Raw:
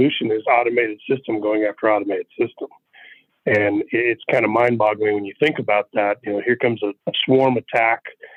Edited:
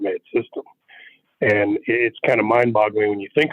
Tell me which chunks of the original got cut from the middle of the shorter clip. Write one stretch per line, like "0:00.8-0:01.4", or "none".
none